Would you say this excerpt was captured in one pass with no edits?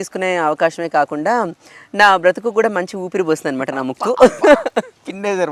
yes; 0 cuts

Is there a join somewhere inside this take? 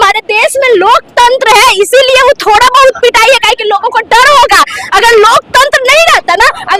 no; 0 cuts

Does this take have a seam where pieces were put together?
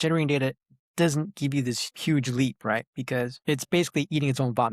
yes; 2 cuts; at 1.9 s, 3.4 s

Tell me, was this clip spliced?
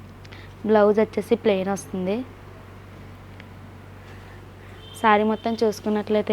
no; 0 cuts

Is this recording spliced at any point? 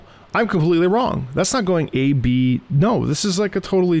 no; 0 cuts

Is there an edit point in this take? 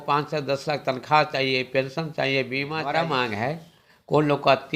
yes; 1 cut; at 2.8 s

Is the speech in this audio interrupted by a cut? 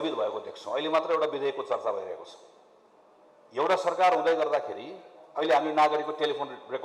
no; 0 cuts

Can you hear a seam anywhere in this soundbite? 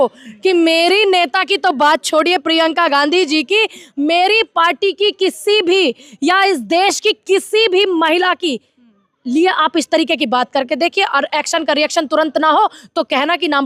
no; 0 cuts

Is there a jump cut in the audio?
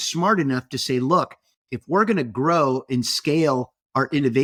no; 0 cuts

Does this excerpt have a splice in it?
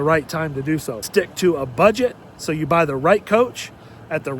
yes; 1 cut; at 1.1 s

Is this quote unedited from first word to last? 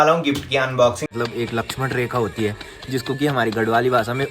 no; 1 cut; at 1.0 s

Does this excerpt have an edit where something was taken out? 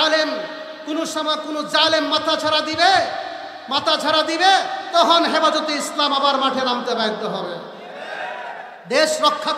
no; 0 cuts

